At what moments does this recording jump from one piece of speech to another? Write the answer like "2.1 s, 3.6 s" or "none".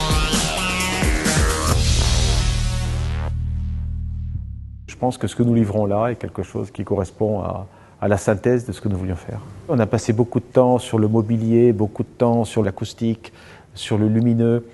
8.9 s